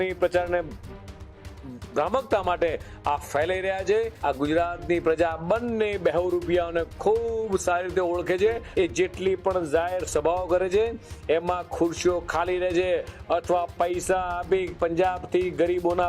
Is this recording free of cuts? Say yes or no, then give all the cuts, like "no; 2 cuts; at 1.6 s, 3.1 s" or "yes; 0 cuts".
no; 2 cuts; at 4.1 s, 8.6 s